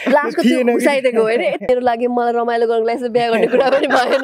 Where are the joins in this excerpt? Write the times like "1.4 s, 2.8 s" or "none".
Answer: 1.7 s